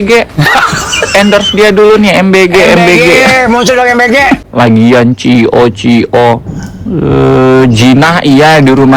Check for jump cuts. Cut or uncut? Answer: cut